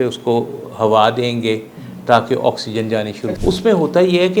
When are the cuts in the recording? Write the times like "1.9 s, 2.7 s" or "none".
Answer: 3.2 s

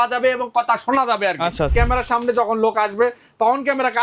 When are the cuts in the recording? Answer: 1.7 s

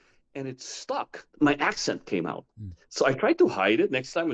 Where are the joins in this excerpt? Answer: 1.2 s

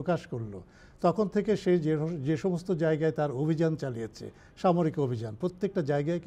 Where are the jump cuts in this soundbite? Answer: none

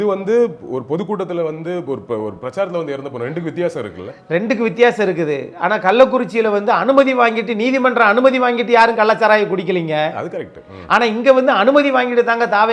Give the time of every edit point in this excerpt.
none

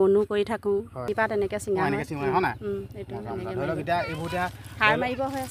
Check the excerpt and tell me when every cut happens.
1.2 s

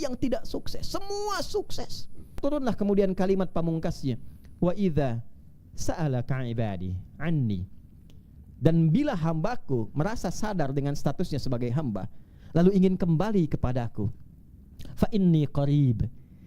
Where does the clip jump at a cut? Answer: 2.3 s

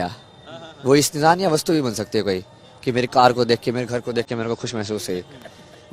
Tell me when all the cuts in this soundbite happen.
none

